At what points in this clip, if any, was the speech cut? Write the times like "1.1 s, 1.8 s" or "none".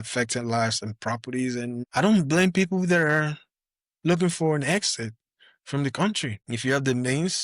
6.4 s